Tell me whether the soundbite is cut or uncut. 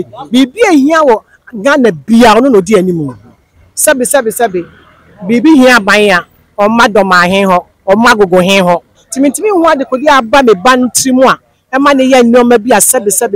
cut